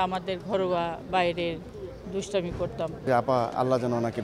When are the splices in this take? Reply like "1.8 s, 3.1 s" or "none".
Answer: 3.0 s